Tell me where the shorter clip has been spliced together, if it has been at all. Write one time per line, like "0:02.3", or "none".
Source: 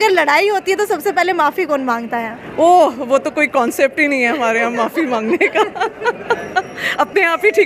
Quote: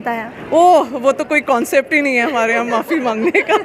none